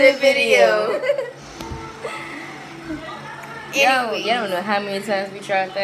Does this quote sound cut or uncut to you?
cut